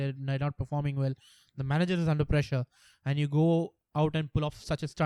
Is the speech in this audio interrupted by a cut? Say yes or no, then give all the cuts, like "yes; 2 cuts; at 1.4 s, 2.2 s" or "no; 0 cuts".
no; 0 cuts